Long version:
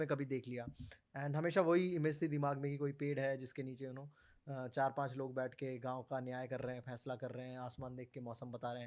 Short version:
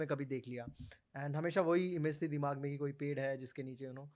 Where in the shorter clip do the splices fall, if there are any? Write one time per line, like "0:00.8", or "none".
none